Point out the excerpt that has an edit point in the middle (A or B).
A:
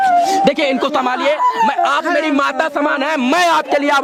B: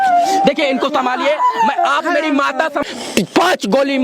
B